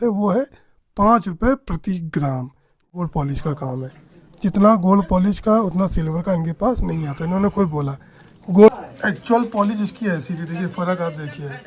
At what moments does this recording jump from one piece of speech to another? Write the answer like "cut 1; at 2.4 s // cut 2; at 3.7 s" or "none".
cut 1; at 2.9 s // cut 2; at 8.7 s